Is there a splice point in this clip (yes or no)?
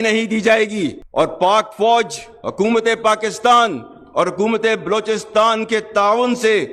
no